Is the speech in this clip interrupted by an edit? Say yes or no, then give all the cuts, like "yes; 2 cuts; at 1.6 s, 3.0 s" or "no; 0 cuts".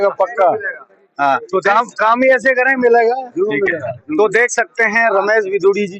no; 0 cuts